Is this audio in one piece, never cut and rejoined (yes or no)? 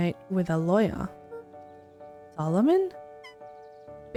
yes